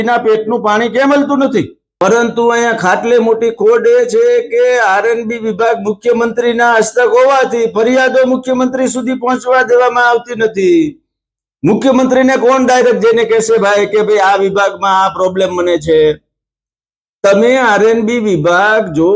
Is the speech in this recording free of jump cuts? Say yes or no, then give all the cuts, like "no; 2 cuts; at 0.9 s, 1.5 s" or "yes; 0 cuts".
no; 1 cut; at 1.8 s